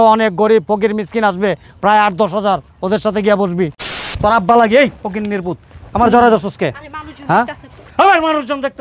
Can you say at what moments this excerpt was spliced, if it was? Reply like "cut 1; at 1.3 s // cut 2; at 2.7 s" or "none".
cut 1; at 4.1 s